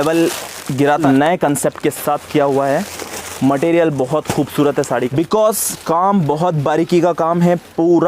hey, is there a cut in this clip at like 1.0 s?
yes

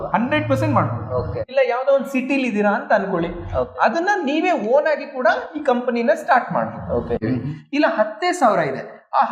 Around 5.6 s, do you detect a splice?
no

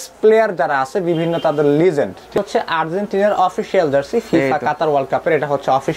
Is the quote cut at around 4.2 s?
no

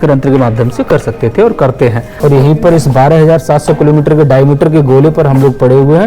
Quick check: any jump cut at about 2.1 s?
yes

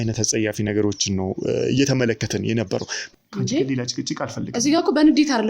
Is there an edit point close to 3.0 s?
yes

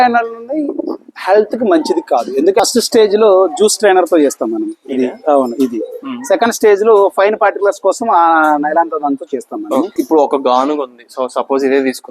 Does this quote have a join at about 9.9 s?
yes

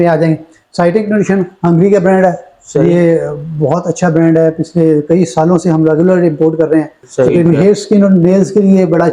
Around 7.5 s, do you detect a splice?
yes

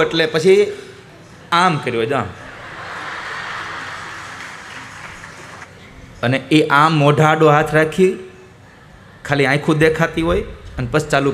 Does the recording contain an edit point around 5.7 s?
yes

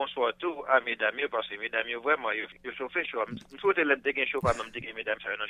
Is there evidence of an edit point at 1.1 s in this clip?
no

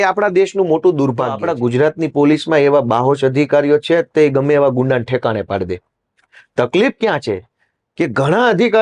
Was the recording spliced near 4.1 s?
no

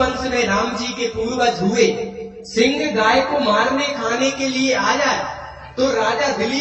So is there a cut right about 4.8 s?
yes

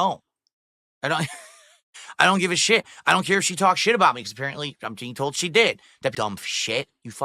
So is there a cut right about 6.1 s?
yes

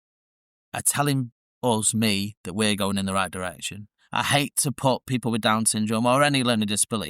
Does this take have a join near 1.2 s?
no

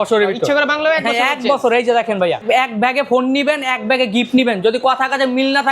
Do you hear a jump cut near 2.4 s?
yes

